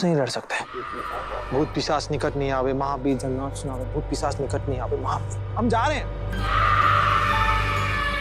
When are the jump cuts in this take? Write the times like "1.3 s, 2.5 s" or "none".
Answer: 1.4 s